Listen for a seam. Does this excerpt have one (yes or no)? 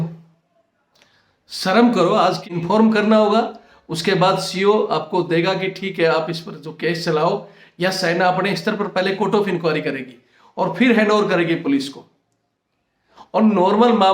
yes